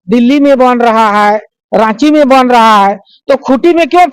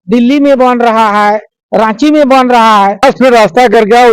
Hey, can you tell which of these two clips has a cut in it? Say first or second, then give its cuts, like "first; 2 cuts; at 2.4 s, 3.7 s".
second; 1 cut; at 3.0 s